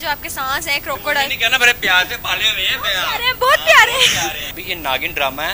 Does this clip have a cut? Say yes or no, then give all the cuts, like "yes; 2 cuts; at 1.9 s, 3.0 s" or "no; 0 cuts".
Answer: yes; 1 cut; at 4.6 s